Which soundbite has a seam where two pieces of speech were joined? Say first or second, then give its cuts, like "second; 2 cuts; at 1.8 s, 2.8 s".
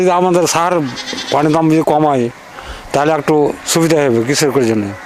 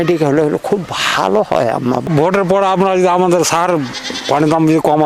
second; 1 cut; at 2.1 s